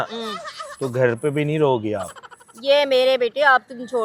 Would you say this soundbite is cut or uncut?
uncut